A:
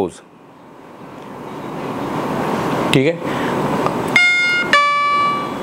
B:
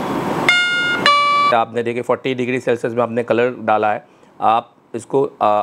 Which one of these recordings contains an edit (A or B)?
B